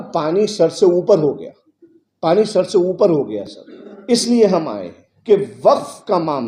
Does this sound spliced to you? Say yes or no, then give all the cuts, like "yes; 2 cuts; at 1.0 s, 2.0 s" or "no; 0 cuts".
no; 0 cuts